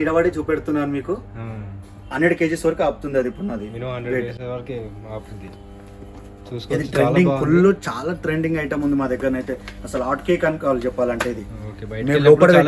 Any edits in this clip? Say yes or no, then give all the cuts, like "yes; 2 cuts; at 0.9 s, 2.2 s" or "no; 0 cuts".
no; 0 cuts